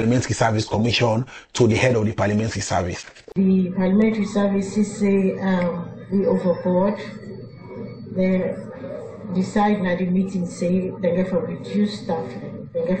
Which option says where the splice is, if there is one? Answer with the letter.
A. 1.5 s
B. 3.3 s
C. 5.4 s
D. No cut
B